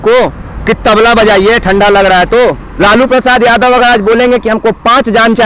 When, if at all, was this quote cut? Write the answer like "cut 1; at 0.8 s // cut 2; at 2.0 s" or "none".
cut 1; at 2.7 s